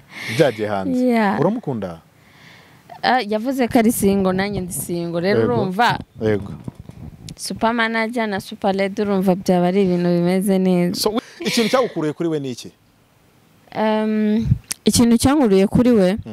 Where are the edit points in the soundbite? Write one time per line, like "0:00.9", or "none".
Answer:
0:11.2

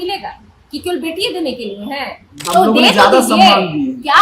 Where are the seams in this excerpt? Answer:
0:02.3

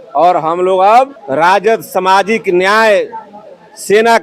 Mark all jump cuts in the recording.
0:01.2

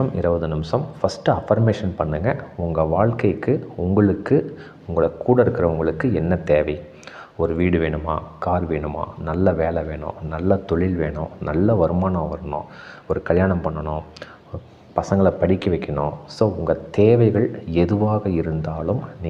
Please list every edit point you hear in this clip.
none

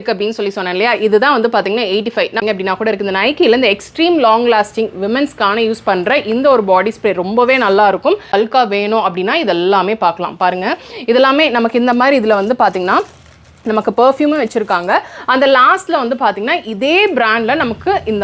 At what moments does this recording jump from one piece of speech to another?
0:02.4
0:08.3

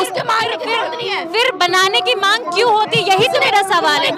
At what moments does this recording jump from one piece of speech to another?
none

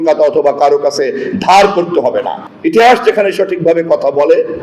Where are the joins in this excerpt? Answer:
0:02.4

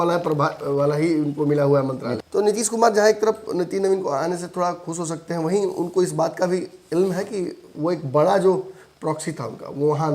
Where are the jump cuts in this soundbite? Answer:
0:02.1

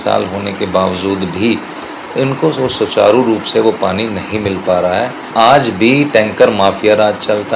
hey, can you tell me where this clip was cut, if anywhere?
0:05.3

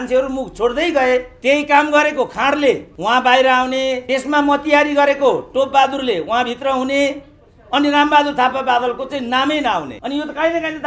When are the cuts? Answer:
0:01.3
0:02.9
0:04.0
0:10.0

